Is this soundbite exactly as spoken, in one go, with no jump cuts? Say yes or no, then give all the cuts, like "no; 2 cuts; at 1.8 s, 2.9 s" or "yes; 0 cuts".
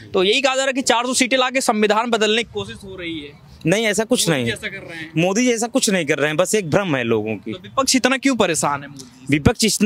yes; 0 cuts